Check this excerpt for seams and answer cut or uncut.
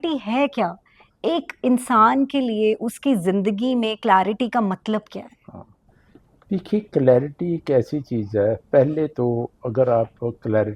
uncut